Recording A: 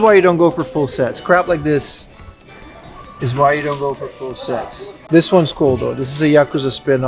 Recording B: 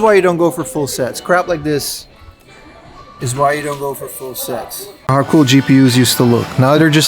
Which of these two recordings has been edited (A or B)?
B